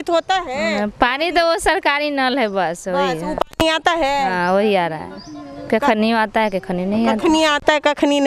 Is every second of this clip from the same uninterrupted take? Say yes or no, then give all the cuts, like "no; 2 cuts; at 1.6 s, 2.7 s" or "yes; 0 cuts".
yes; 0 cuts